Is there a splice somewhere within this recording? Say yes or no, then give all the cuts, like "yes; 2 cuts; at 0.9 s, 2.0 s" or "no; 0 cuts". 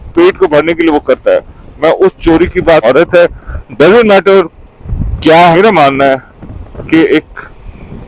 yes; 2 cuts; at 2.8 s, 5.5 s